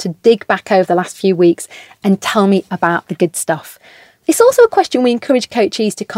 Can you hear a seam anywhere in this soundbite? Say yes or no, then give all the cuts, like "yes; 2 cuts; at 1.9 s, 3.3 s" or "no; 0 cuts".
no; 0 cuts